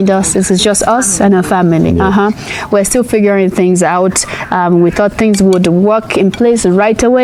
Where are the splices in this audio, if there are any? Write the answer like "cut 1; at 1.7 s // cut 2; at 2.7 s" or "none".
none